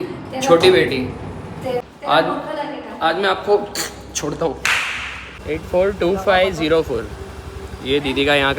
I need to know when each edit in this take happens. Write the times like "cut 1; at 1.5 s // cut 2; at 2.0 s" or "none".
cut 1; at 1.8 s // cut 2; at 5.3 s